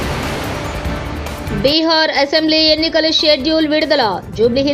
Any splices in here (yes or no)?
no